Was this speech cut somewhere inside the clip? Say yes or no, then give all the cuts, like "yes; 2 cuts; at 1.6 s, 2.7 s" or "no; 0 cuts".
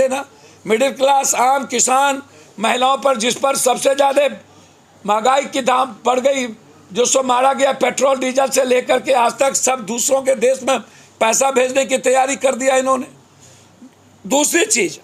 no; 0 cuts